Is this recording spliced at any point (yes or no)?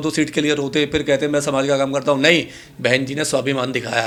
no